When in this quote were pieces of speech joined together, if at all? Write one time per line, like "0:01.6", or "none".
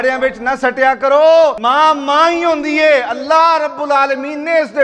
0:01.6

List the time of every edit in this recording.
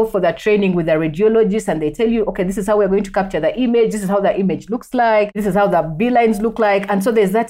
0:05.4

